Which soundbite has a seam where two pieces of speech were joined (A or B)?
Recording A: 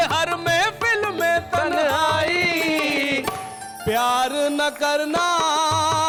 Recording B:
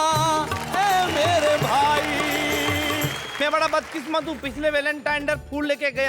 B